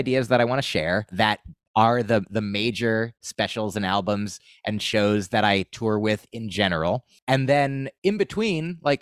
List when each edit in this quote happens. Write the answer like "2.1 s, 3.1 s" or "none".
1.1 s, 7.2 s